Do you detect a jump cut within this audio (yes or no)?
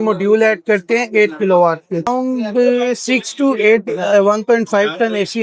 yes